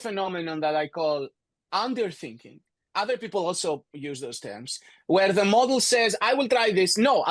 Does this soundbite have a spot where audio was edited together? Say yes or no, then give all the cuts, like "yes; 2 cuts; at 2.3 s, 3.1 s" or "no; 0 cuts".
no; 0 cuts